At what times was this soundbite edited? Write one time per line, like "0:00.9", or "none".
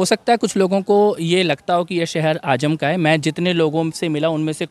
none